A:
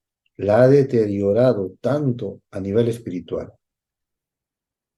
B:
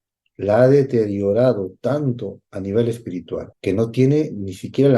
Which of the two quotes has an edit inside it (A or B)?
B